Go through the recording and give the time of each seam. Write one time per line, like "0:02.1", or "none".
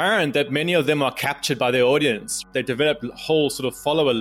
0:02.4